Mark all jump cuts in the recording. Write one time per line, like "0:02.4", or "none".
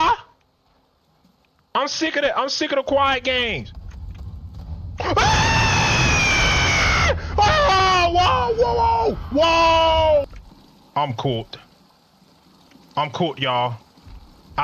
0:10.3

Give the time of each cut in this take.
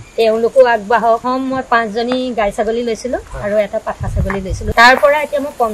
0:01.2
0:04.6

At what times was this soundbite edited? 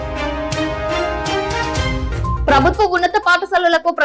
0:02.4

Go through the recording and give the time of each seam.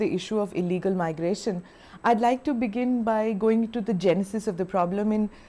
none

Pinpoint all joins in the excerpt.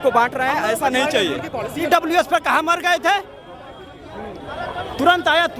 0:01.8

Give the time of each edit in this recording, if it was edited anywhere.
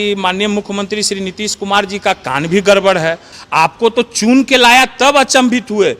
0:03.3

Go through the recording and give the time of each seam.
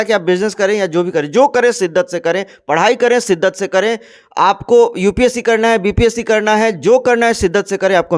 none

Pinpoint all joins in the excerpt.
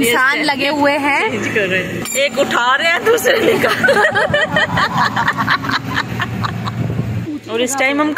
0:02.0
0:07.2

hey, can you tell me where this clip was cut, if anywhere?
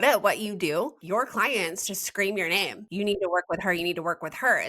0:01.0
0:02.8

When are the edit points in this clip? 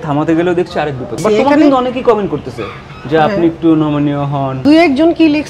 0:01.1
0:04.6

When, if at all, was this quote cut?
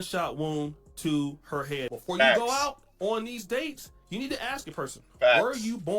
0:01.9

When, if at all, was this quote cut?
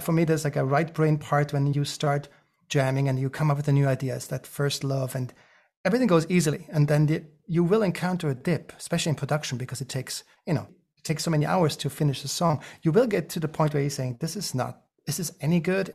0:10.9

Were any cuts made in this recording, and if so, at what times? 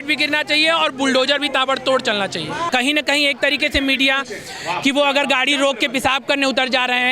0:02.7

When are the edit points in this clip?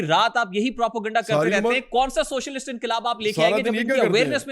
none

